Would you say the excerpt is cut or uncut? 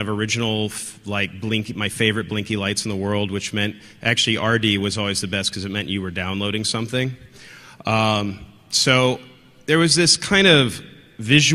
cut